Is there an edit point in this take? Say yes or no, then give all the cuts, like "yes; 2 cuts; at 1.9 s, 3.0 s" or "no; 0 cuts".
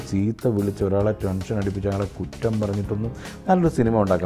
no; 0 cuts